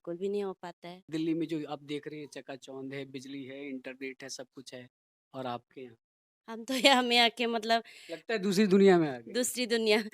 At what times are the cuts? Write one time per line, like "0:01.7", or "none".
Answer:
0:01.0